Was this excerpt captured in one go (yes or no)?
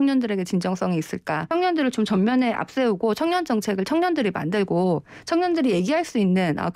no